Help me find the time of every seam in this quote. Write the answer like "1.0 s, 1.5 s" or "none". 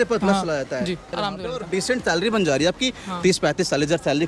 1.2 s